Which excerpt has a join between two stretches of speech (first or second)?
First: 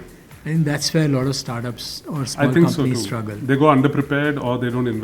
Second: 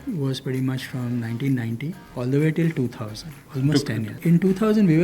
second